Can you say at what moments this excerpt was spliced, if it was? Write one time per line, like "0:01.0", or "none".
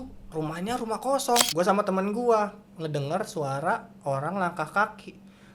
0:01.5